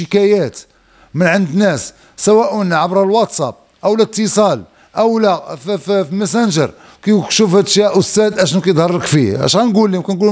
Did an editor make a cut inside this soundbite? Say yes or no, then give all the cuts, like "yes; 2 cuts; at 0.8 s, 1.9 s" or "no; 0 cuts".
no; 0 cuts